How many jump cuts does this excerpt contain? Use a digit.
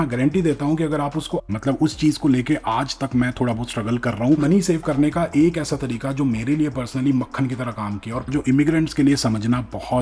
3